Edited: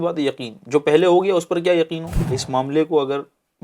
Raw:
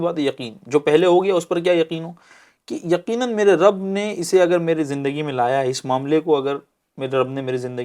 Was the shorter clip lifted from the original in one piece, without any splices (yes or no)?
no